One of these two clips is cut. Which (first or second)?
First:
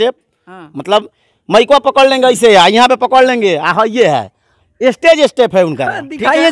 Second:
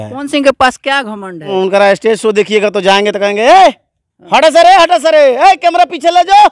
second